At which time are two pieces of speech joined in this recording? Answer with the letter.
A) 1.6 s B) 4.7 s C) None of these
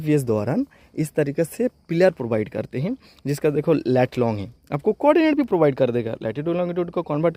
C